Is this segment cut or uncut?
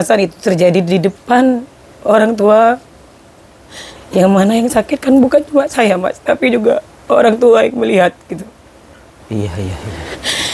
uncut